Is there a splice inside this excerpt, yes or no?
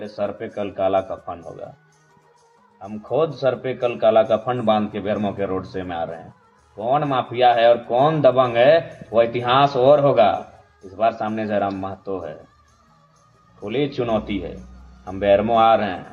no